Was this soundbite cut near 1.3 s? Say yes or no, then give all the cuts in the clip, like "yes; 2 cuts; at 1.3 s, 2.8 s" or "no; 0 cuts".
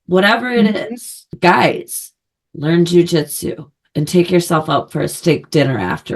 yes; 1 cut; at 1.3 s